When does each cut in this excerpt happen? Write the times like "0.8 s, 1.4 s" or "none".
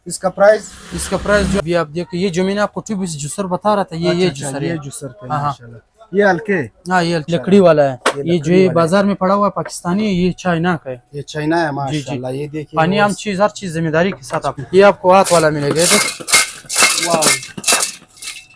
1.6 s, 7.3 s, 14.6 s